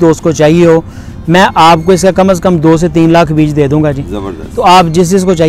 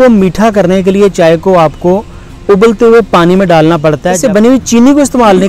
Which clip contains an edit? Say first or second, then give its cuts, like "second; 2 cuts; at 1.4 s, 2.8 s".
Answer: second; 1 cut; at 4.2 s